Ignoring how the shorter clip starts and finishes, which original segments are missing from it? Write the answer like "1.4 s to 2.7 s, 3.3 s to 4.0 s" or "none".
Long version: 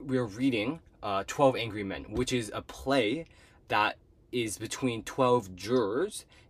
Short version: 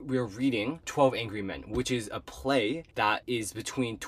0.9 s to 1.3 s, 3.5 s to 4.1 s